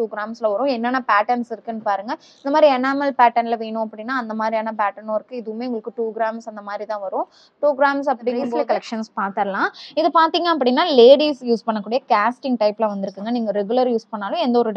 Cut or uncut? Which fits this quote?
cut